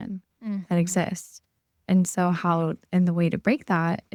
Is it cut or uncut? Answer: uncut